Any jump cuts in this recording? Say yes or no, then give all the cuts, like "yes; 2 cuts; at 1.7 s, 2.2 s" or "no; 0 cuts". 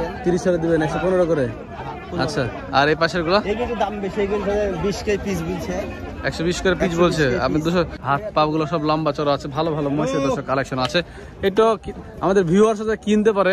yes; 1 cut; at 8.0 s